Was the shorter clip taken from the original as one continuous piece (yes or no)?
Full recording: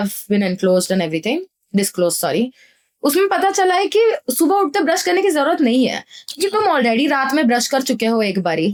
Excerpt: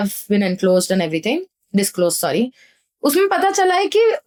yes